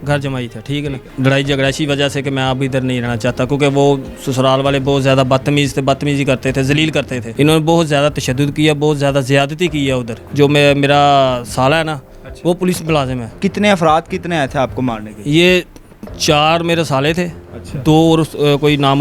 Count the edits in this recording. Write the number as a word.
four